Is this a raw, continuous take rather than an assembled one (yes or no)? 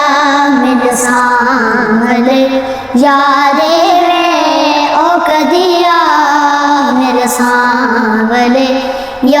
yes